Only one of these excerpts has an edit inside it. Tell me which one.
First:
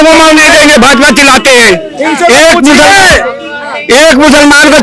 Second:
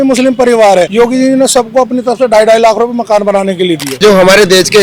second; 2 cuts; at 0.9 s, 4.0 s

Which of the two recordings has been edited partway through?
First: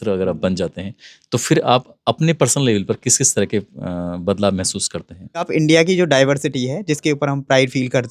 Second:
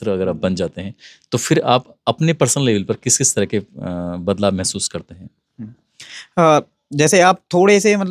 first; 1 cut; at 5.5 s

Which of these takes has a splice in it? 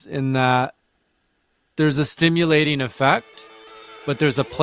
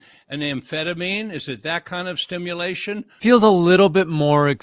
second; 1 cut; at 3.2 s

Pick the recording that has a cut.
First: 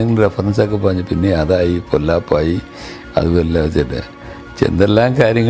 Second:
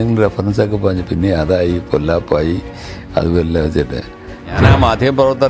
second; 1 cut; at 4.5 s

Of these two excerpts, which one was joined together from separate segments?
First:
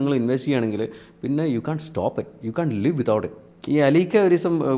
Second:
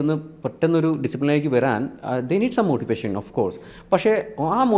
first; 1 cut; at 3.5 s

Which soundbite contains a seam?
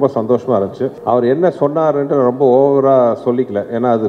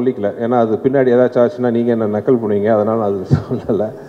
first; 1 cut; at 1.0 s

